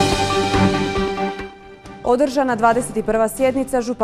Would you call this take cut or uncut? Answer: cut